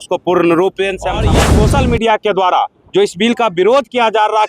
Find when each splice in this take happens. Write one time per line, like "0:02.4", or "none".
0:01.4